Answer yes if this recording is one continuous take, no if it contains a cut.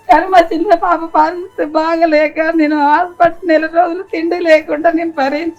yes